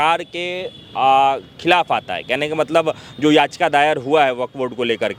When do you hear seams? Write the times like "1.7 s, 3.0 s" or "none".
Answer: none